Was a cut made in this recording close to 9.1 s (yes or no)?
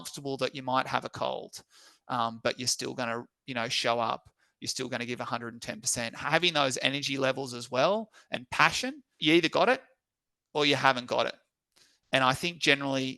yes